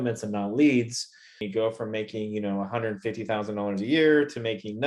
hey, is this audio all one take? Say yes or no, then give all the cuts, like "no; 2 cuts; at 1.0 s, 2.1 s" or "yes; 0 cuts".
no; 1 cut; at 1.4 s